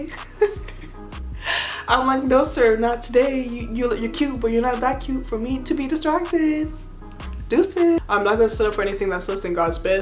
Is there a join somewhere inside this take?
yes; 1 cut; at 8.0 s

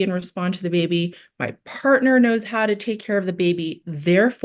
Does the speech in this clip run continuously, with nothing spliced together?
yes; 0 cuts

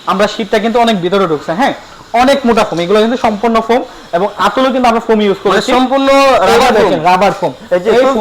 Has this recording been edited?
no; 0 cuts

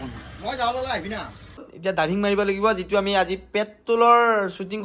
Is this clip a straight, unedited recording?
no; 1 cut; at 1.7 s

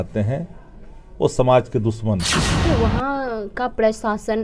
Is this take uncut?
no; 1 cut; at 2.7 s

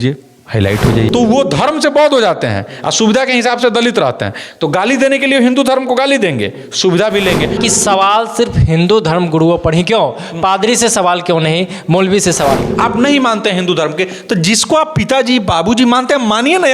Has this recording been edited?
yes; 3 cuts; at 1.1 s, 7.6 s, 12.7 s

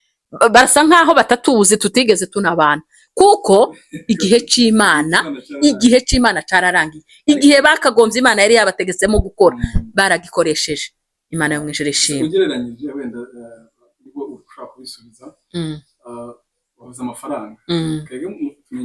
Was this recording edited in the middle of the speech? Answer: no; 0 cuts

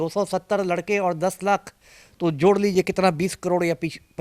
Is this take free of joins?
yes; 0 cuts

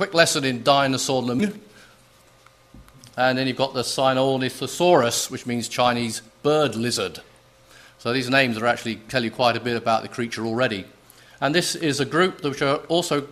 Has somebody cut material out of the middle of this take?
no; 0 cuts

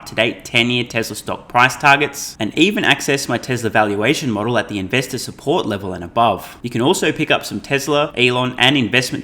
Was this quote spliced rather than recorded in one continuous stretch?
yes; 2 cuts; at 6.6 s, 8.1 s

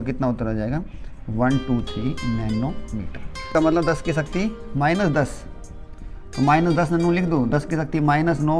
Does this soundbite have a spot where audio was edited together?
yes; 1 cut; at 3.5 s

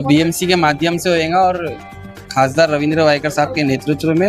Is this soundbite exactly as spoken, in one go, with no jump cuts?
yes; 0 cuts

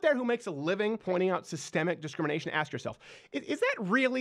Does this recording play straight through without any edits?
no; 1 cut; at 1.0 s

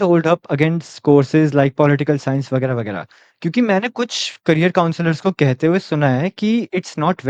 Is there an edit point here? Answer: no; 0 cuts

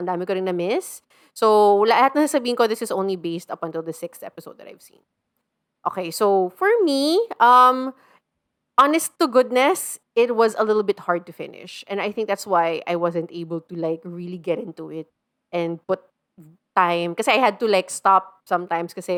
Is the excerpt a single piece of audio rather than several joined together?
yes; 0 cuts

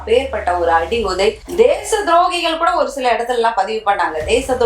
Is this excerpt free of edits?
yes; 0 cuts

